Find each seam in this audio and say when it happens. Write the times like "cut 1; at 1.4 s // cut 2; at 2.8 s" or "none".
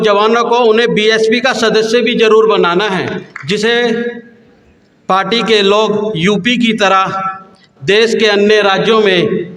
cut 1; at 3.3 s